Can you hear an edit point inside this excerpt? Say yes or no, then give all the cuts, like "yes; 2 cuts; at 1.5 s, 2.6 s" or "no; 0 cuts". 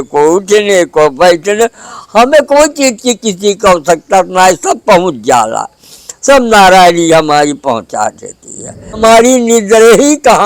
yes; 1 cut; at 9.0 s